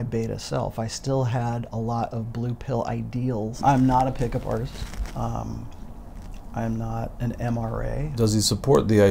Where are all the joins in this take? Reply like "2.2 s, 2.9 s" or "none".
3.6 s, 8.1 s